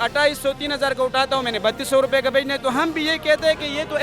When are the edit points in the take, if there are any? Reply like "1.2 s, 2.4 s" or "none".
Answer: none